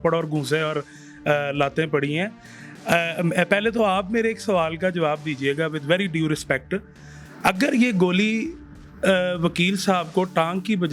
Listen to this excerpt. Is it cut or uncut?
uncut